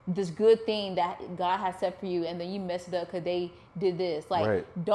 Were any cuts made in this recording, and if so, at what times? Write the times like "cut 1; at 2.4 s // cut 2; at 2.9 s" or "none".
none